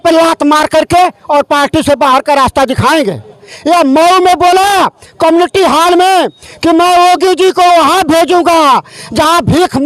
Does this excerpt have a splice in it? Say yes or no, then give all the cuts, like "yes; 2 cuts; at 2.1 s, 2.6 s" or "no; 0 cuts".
yes; 1 cut; at 3.5 s